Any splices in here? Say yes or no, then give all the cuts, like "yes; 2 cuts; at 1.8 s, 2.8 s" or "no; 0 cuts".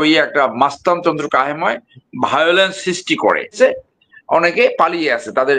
yes; 1 cut; at 3.5 s